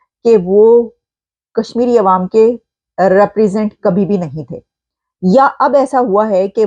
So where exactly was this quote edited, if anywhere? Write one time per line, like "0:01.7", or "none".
none

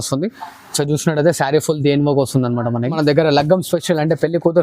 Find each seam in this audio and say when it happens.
0:03.0

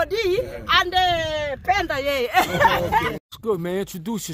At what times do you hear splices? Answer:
0:03.2

